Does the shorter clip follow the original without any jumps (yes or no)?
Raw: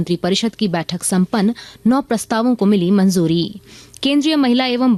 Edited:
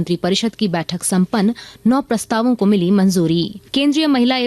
no